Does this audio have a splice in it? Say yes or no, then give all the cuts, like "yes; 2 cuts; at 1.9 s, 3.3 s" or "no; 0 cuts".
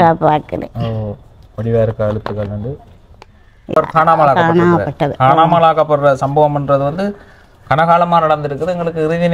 yes; 1 cut; at 3.7 s